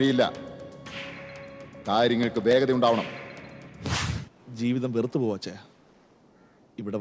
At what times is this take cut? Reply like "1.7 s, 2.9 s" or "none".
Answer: 4.0 s